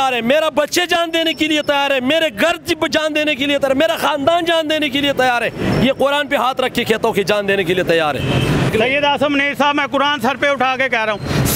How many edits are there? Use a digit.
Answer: 1